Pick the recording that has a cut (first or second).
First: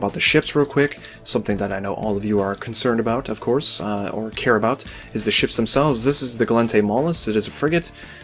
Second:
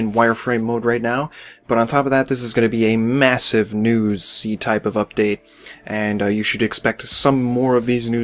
first